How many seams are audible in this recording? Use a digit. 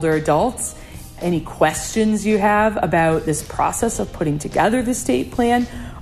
1